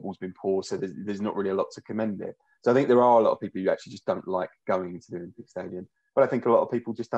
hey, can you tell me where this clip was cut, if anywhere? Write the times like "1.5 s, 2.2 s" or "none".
none